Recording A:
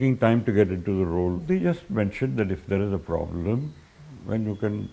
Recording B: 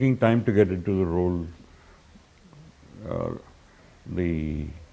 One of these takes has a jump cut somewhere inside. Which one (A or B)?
A